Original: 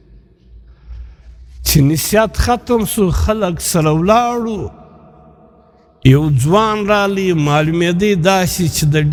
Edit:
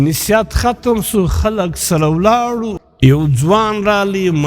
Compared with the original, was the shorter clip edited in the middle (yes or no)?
yes